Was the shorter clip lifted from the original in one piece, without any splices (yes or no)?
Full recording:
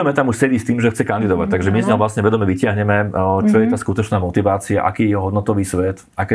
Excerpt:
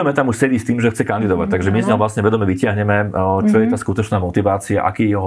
yes